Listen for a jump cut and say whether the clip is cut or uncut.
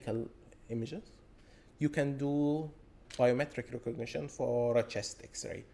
cut